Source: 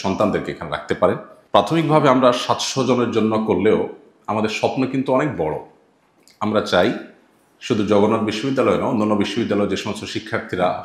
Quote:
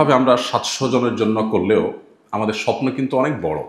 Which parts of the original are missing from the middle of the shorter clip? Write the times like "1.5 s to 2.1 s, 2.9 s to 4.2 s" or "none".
none